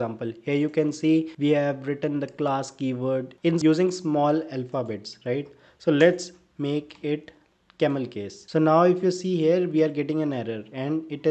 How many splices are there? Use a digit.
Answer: 1